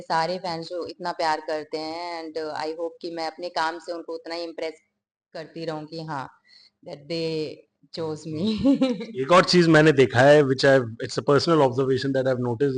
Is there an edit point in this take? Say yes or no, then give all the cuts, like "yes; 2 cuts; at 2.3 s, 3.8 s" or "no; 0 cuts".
no; 0 cuts